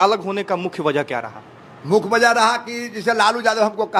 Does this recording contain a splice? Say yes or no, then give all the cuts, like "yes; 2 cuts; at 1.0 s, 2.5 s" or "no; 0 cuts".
no; 0 cuts